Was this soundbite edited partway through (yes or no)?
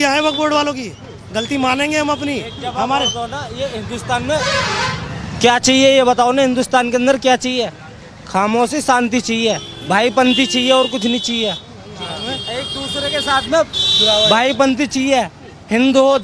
no